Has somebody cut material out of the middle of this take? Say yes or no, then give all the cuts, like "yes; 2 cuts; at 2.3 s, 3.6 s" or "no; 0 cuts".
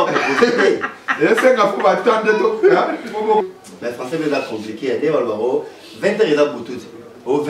yes; 1 cut; at 3.4 s